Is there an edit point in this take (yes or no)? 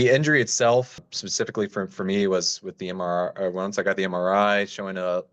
no